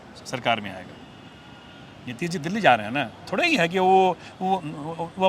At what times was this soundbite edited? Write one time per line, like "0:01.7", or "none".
none

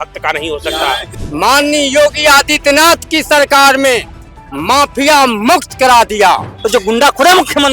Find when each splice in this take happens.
0:01.1
0:06.6

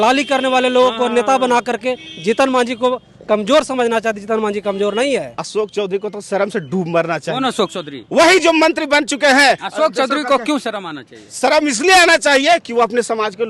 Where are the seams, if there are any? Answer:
0:05.4
0:09.6

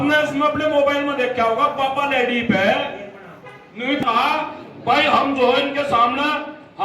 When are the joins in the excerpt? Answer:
0:04.0

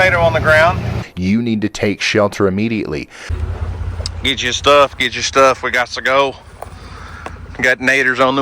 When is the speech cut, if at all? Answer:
0:01.0
0:03.3

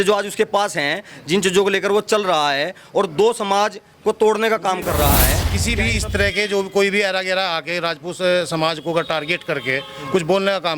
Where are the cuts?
0:05.5

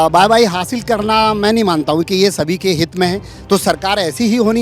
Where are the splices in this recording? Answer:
none

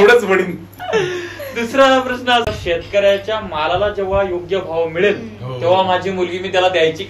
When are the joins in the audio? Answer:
0:02.5

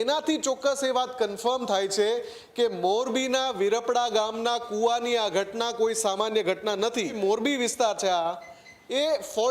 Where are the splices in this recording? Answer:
0:07.1

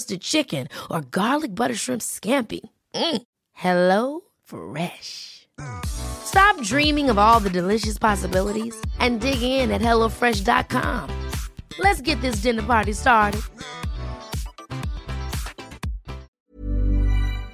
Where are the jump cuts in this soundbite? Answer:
0:16.3

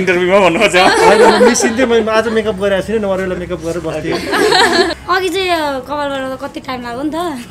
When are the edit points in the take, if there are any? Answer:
0:04.9

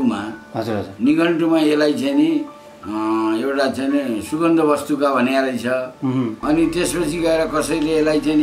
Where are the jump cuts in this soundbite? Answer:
0:06.4

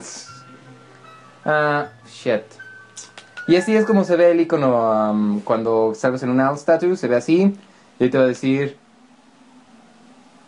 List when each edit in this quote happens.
0:01.6

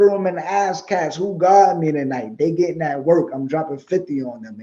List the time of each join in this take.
none

